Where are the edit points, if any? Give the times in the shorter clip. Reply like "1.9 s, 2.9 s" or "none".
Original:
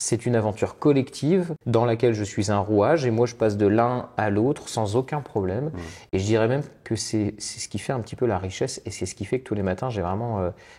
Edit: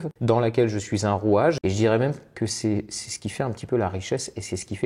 1.6 s